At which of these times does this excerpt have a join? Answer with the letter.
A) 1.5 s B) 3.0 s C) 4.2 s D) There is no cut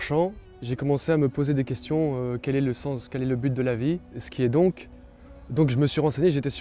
C